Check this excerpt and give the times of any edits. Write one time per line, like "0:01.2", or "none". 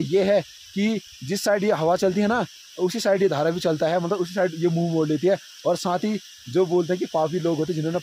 none